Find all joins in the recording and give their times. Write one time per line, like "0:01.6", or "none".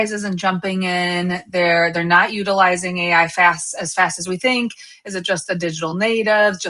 0:04.4